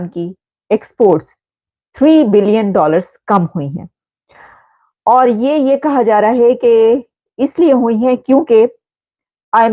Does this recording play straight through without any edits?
yes; 0 cuts

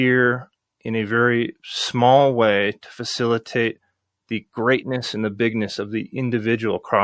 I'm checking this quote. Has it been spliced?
no; 0 cuts

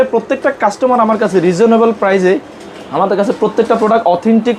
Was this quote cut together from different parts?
no; 0 cuts

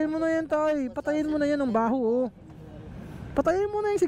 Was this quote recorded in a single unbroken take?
yes; 0 cuts

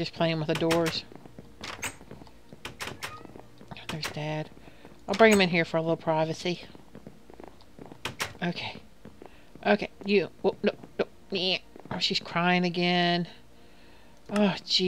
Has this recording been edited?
yes; 1 cut; at 12.7 s

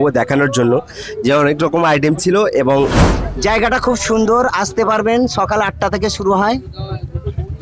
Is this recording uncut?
no; 1 cut; at 2.9 s

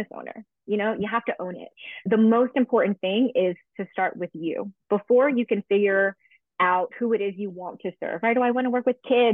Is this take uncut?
no; 1 cut; at 2.1 s

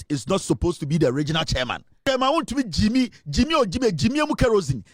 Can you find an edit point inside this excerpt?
yes; 1 cut; at 2.1 s

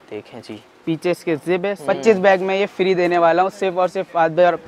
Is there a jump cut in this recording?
yes; 1 cut; at 1.7 s

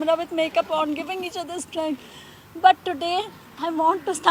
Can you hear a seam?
no; 0 cuts

